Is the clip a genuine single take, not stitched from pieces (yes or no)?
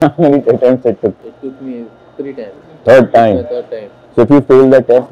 yes